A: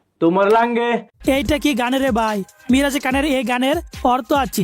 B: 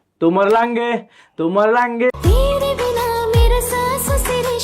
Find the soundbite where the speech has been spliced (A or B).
B